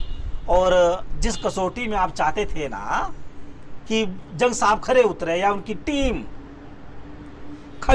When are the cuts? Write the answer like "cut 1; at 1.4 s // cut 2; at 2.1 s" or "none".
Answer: none